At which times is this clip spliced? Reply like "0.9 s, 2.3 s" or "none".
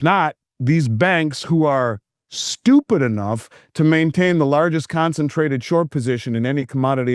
none